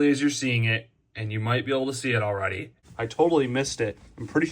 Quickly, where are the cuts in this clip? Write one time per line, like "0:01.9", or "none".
0:02.8